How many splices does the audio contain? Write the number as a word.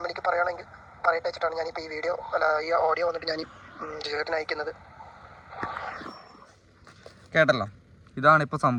zero